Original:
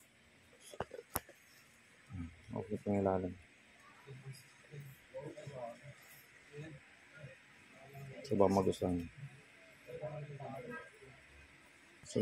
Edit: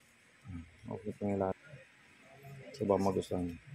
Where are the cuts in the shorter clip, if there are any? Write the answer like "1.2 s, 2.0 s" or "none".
1.6 s